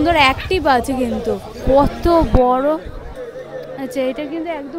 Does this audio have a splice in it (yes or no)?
yes